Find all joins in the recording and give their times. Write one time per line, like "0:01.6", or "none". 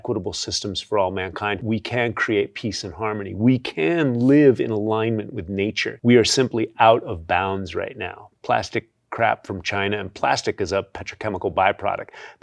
0:01.6
0:05.9